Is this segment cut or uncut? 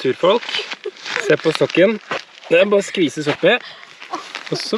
uncut